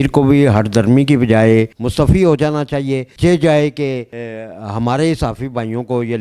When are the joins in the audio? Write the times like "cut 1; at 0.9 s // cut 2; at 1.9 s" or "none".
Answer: cut 1; at 1.7 s